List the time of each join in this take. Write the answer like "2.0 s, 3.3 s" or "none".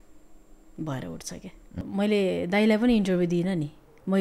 1.7 s